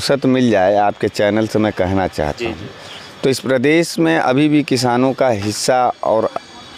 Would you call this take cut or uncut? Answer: uncut